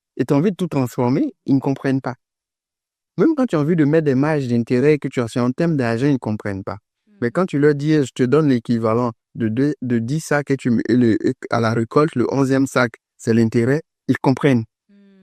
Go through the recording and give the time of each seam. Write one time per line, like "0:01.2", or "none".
none